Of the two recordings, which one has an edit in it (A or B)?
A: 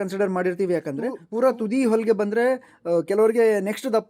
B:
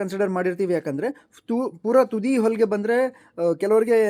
A